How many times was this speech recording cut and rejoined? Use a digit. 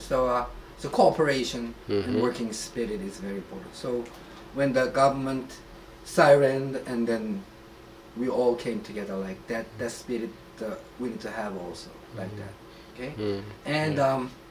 0